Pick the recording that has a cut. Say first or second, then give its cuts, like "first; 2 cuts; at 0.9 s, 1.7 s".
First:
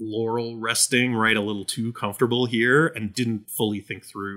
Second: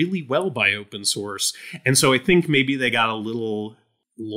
first; 1 cut; at 3.2 s